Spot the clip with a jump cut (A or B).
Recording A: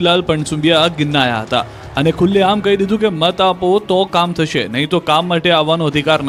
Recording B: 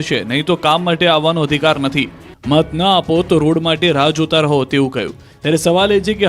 B